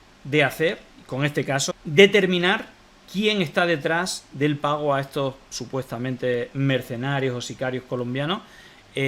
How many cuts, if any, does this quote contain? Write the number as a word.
one